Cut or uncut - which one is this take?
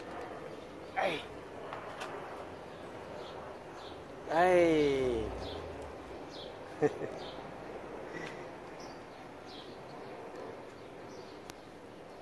uncut